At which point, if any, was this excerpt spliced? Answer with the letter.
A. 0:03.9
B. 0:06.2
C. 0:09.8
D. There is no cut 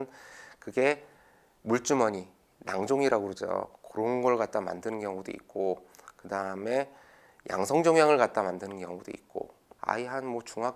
C